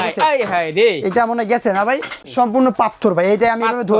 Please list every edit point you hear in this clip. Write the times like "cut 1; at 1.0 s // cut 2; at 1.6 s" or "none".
cut 1; at 2.3 s